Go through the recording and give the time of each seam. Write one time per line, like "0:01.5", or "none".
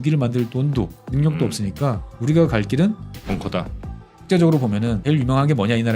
0:01.0
0:02.1
0:03.8
0:05.0

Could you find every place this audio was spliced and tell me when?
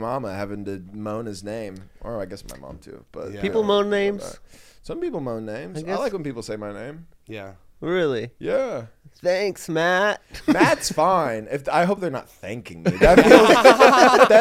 none

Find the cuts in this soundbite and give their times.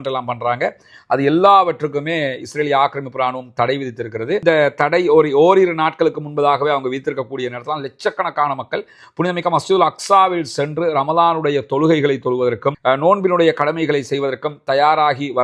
none

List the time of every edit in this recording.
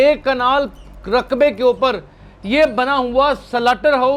none

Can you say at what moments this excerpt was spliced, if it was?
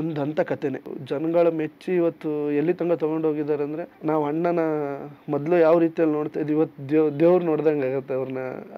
0:00.9
0:03.9

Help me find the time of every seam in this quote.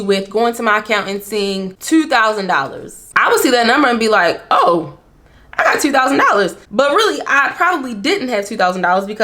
0:01.7
0:06.6

